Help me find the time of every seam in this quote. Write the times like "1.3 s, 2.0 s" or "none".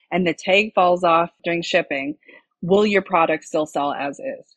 1.4 s